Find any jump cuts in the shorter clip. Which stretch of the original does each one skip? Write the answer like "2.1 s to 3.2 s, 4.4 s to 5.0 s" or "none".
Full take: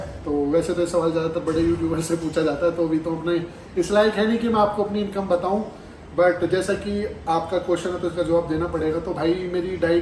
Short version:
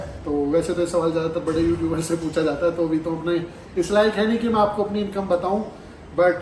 none